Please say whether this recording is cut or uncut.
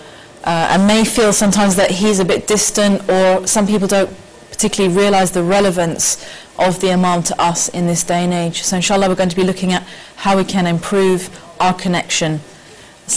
cut